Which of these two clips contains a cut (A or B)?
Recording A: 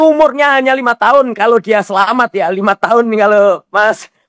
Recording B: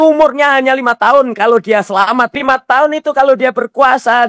B